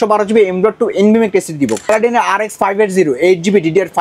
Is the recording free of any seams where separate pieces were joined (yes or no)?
no